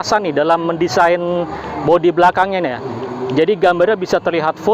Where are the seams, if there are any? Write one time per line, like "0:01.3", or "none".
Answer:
none